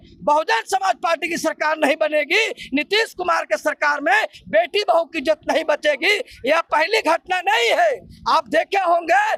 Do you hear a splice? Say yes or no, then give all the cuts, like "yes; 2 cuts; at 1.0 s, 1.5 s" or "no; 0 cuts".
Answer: no; 0 cuts